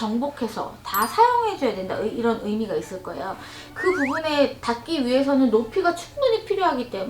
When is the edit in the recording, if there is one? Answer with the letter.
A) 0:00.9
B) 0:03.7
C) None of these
B